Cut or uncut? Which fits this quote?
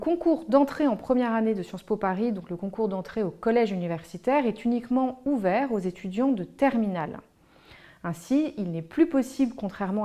uncut